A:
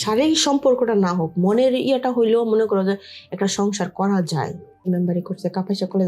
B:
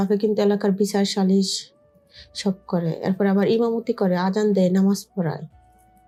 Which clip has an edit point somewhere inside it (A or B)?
A